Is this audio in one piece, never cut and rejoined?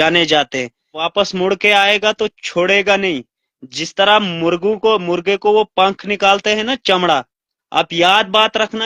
no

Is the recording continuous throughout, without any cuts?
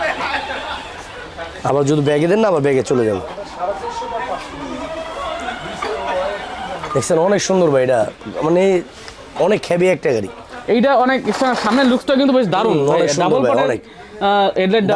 yes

